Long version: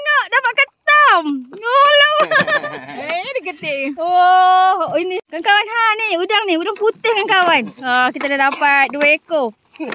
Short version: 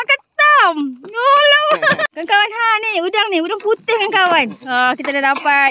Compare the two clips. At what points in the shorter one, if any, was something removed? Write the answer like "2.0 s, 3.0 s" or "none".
2.1 s